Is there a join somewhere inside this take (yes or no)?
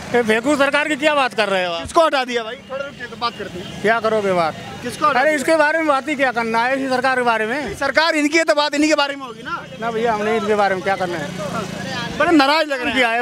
no